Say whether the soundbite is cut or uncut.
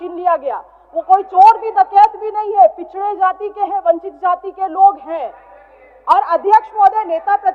uncut